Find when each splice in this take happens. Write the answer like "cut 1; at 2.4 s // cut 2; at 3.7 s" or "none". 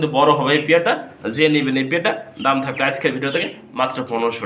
none